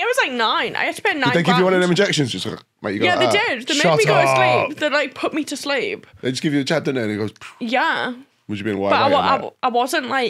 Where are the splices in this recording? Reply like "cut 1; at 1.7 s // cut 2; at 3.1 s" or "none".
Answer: none